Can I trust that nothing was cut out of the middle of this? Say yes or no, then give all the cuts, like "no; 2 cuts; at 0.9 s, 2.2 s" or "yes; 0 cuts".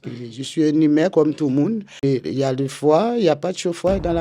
no; 1 cut; at 2.0 s